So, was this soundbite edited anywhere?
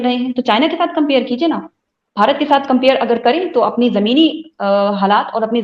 no; 0 cuts

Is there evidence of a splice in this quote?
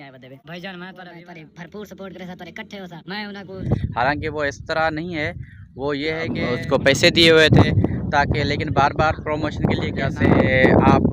yes; 3 cuts; at 1.2 s, 6.4 s, 10.1 s

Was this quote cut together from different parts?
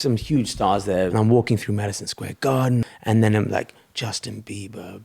yes; 2 cuts; at 1.1 s, 2.9 s

